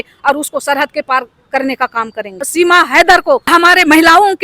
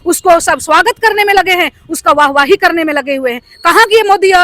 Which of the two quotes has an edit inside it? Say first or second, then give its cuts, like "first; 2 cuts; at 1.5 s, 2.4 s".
first; 2 cuts; at 2.5 s, 3.5 s